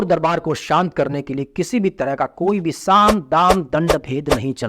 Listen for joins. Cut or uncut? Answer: uncut